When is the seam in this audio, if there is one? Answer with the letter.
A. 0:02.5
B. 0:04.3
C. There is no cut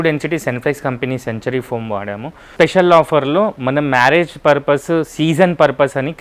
A